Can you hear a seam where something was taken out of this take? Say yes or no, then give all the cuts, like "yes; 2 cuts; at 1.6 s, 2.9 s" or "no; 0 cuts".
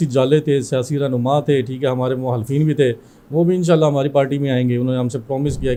no; 0 cuts